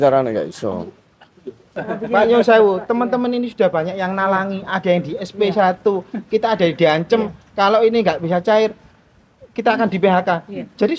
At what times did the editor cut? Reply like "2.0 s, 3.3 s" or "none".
1.7 s